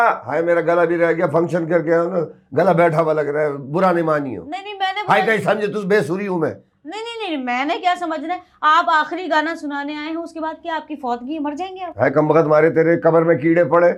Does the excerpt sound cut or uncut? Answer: uncut